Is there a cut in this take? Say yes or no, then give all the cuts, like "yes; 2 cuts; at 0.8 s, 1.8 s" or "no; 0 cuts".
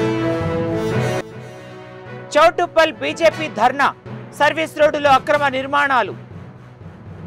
yes; 1 cut; at 1.2 s